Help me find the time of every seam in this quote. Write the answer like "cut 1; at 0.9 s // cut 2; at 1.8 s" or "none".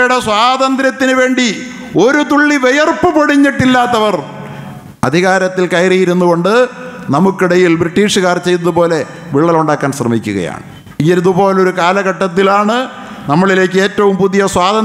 none